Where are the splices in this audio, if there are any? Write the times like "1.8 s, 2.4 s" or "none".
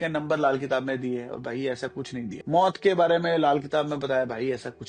2.4 s